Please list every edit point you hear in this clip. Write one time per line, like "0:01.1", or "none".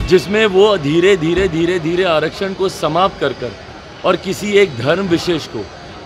none